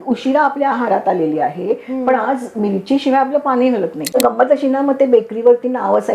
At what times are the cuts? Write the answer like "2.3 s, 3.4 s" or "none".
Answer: 4.1 s